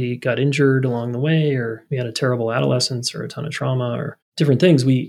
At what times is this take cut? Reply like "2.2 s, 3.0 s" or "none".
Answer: 1.8 s, 4.2 s